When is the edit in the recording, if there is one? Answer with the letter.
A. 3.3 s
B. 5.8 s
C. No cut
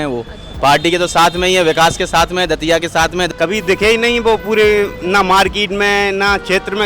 A